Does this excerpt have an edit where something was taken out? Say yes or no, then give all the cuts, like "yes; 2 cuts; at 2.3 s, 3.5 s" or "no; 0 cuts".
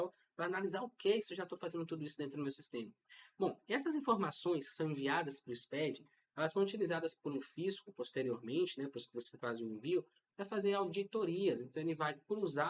no; 0 cuts